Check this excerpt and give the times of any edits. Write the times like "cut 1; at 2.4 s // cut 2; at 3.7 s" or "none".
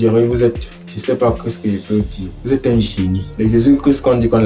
cut 1; at 2.3 s // cut 2; at 3.3 s